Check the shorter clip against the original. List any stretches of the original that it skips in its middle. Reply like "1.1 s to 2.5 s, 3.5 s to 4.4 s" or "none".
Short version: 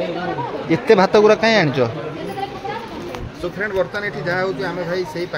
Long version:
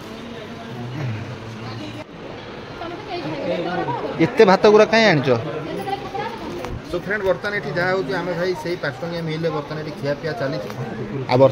none